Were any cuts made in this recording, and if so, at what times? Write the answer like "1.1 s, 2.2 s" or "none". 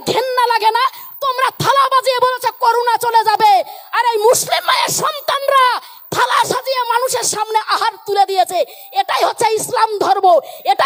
none